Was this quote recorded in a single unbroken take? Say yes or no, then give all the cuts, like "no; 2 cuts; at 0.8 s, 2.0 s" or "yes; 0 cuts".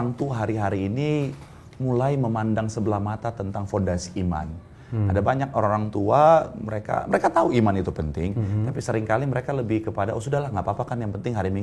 yes; 0 cuts